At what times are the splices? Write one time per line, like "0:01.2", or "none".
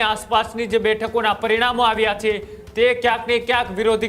none